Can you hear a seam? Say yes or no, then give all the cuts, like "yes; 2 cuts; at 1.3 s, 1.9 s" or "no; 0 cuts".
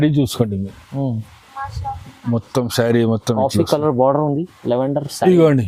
no; 0 cuts